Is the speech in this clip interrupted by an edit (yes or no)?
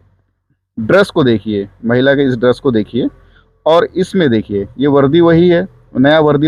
no